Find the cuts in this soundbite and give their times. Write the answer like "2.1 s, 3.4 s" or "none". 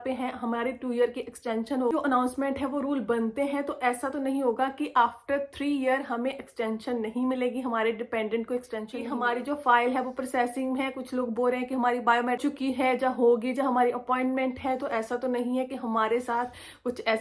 1.9 s, 9.0 s, 12.4 s

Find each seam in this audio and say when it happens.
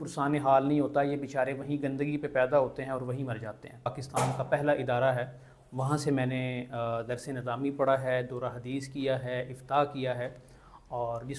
4.0 s

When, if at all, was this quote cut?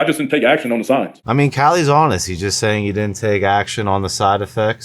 1.2 s

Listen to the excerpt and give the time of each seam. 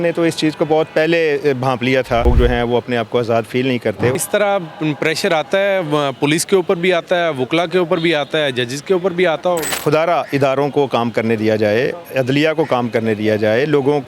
2.3 s, 4.1 s, 9.7 s

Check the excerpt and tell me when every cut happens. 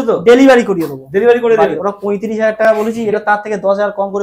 1.8 s

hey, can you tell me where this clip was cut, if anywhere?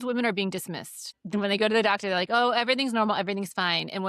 1.2 s

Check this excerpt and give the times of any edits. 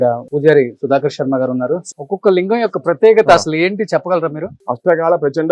1.9 s, 4.5 s

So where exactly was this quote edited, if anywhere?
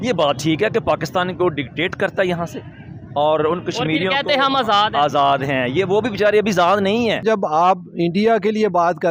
7.2 s

